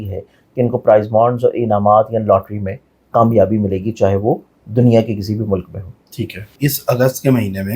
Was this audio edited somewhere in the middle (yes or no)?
yes